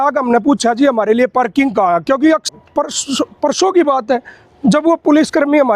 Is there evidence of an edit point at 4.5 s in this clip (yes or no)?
no